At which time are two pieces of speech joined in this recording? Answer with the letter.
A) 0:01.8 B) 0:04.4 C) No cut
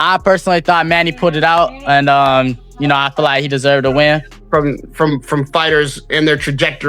B